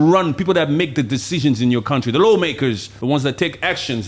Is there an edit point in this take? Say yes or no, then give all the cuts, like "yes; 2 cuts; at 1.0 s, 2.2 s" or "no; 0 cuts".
yes; 1 cut; at 2.9 s